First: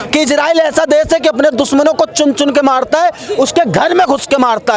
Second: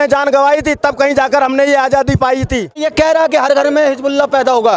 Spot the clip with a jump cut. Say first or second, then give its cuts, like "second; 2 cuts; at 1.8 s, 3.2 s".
second; 1 cut; at 2.9 s